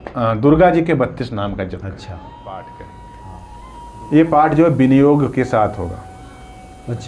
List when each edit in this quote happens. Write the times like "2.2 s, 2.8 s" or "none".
3.2 s